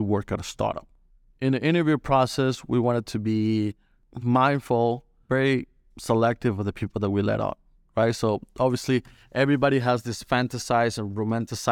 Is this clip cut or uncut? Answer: cut